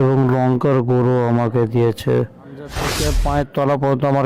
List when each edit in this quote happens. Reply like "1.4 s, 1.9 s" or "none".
3.0 s